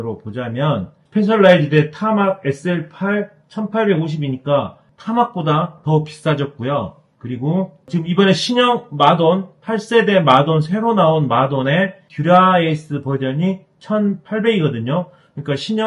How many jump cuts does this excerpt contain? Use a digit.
1